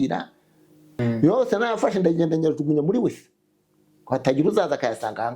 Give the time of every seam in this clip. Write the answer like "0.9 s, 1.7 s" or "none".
1.0 s